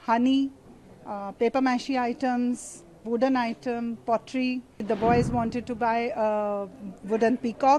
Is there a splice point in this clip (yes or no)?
yes